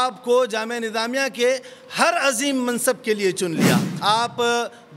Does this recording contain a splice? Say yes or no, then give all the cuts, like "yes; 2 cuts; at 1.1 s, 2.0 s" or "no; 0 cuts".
yes; 1 cut; at 3.9 s